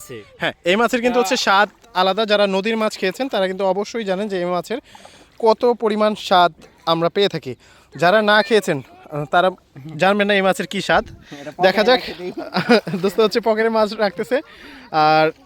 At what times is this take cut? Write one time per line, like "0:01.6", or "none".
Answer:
none